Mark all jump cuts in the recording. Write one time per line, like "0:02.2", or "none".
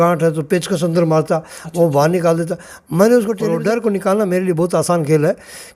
0:03.6